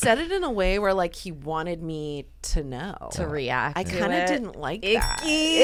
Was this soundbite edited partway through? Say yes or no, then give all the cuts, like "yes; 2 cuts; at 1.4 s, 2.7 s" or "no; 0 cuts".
no; 0 cuts